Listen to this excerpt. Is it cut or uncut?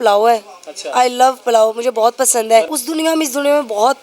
cut